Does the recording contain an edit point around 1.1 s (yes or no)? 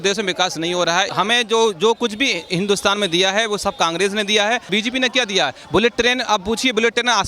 yes